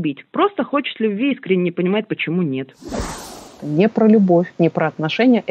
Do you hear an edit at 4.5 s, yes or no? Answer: yes